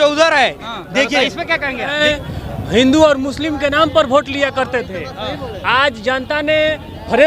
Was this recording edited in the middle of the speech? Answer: yes; 1 cut; at 2.0 s

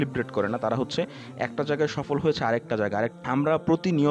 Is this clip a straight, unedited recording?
no; 1 cut; at 3.1 s

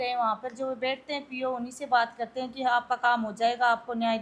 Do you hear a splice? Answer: no; 0 cuts

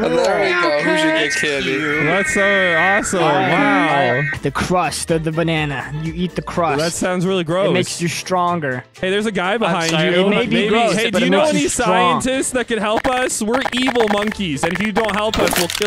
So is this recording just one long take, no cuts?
no; 1 cut; at 4.3 s

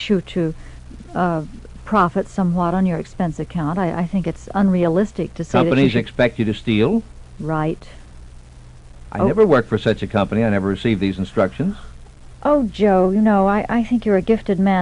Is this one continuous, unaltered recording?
yes; 0 cuts

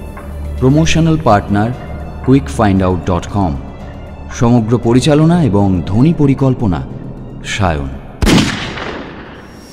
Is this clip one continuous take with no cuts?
no; 1 cut; at 8.0 s

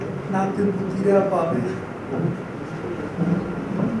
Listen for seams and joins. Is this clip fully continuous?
yes; 0 cuts

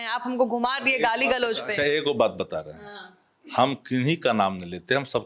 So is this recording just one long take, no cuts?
yes; 0 cuts

